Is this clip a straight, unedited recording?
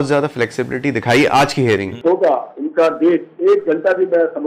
no; 1 cut; at 1.9 s

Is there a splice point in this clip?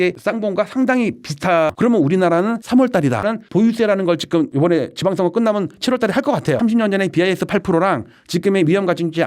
yes; 3 cuts; at 1.7 s, 3.3 s, 6.6 s

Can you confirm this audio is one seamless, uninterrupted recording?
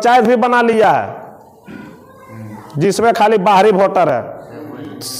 yes; 0 cuts

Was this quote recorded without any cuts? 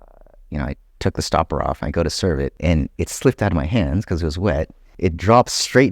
no; 2 cuts; at 2.5 s, 4.8 s

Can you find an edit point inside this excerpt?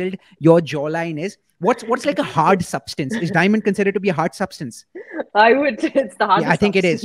no; 0 cuts

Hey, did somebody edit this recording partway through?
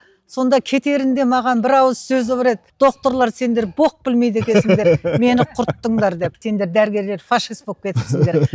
yes; 2 cuts; at 2.7 s, 6.4 s

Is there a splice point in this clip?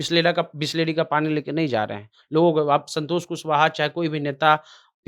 no; 0 cuts

